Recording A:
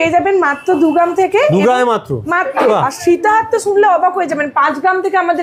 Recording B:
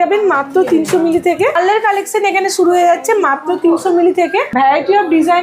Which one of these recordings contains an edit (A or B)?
B